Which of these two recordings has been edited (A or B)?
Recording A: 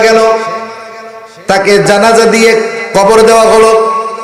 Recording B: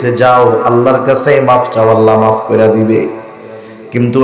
A